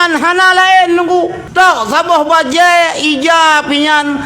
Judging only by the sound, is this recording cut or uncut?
cut